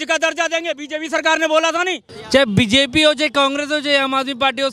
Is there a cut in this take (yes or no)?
yes